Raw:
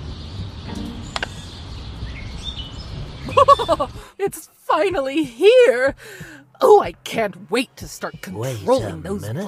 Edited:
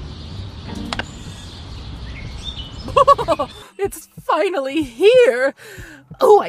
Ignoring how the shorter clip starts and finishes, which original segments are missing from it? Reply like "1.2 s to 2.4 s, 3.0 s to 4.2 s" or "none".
2.8 s to 3.2 s